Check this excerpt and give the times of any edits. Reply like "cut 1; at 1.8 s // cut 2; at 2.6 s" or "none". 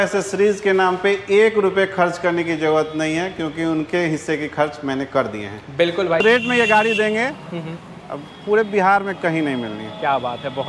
cut 1; at 6.2 s